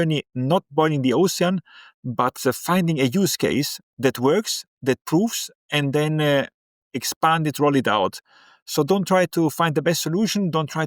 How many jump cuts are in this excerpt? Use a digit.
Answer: 0